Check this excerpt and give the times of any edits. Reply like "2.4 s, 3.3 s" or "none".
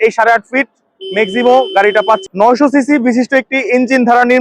2.2 s